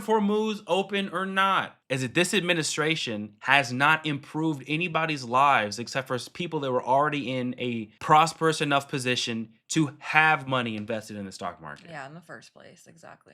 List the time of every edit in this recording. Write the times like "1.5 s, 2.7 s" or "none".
1.8 s

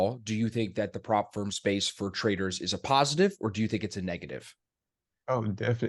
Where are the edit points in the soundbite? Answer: none

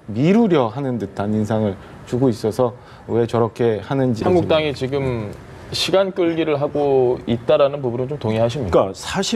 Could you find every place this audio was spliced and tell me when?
4.2 s

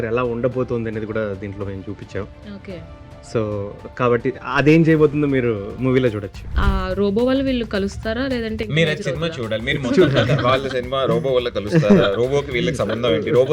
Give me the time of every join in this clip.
6.6 s

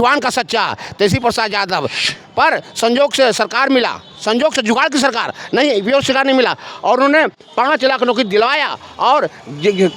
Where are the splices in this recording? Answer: 2.0 s

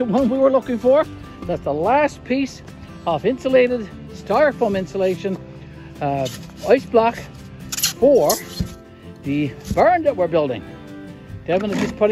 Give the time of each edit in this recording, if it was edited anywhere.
none

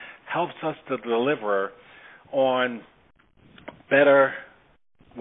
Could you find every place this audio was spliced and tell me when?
none

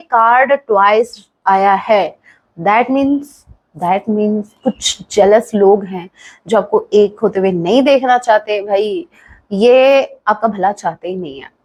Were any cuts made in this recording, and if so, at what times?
none

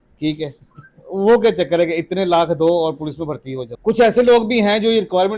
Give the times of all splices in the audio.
3.6 s

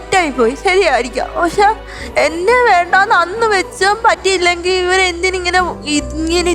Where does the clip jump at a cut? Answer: none

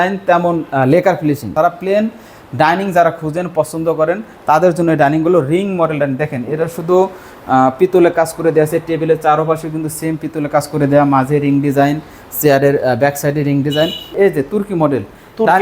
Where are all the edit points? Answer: 1.5 s, 14.1 s

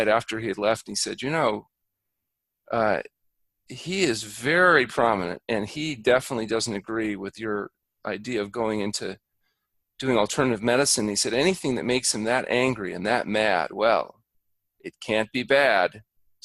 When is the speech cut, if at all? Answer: none

